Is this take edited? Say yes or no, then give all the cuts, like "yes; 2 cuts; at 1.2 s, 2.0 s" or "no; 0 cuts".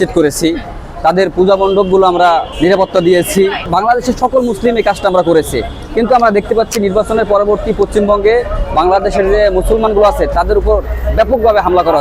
yes; 2 cuts; at 2.5 s, 3.7 s